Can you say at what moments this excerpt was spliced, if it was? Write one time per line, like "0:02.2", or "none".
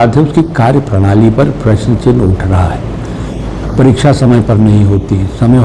none